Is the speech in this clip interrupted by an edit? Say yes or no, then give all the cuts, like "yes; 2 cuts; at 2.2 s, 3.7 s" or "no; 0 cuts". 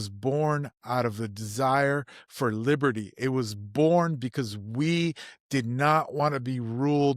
no; 0 cuts